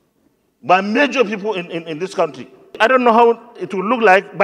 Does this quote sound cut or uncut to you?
cut